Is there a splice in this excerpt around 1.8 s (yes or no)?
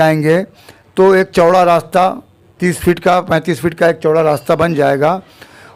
no